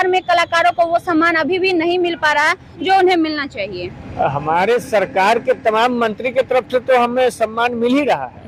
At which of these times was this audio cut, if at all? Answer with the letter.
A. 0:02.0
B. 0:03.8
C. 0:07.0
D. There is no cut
D